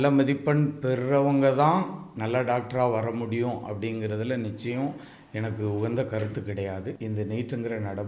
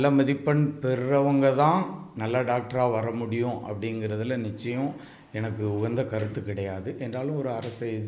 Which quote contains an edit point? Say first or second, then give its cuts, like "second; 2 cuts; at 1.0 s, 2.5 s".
first; 1 cut; at 6.9 s